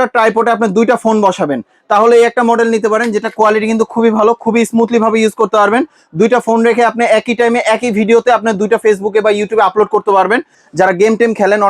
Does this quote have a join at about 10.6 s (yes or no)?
yes